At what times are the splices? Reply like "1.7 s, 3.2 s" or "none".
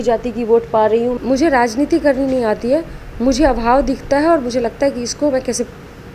1.2 s